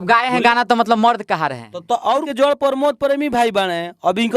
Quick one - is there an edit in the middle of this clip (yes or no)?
yes